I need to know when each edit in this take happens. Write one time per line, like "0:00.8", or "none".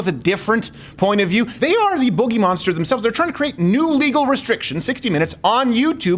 0:01.5